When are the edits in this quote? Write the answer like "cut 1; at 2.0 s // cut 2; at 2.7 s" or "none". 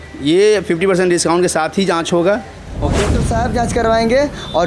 cut 1; at 3.2 s